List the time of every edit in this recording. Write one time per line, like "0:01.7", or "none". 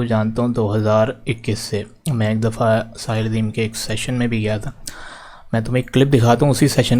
none